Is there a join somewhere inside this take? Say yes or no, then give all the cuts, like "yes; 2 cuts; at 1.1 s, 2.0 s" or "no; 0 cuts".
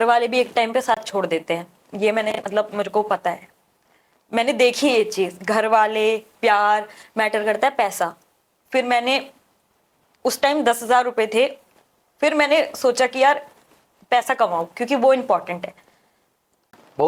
no; 0 cuts